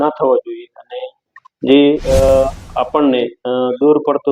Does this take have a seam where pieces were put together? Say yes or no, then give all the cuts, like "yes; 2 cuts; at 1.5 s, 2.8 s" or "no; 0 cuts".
no; 0 cuts